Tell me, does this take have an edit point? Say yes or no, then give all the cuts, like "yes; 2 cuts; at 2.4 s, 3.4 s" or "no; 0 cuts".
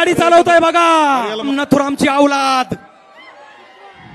yes; 1 cut; at 1.5 s